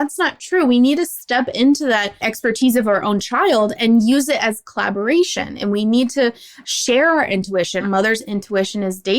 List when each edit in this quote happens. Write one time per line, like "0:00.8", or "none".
0:07.8